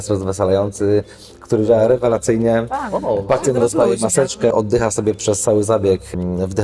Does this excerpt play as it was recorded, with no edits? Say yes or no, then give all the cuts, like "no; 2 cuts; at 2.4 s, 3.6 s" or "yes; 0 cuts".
no; 1 cut; at 4.5 s